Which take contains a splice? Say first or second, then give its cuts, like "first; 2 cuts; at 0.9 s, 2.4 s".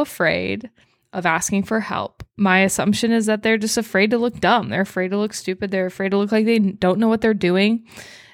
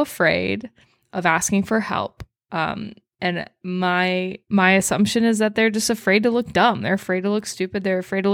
first; 1 cut; at 2.2 s